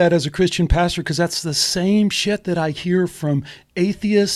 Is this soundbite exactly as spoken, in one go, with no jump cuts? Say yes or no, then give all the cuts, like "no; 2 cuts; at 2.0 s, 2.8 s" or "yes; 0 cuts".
yes; 0 cuts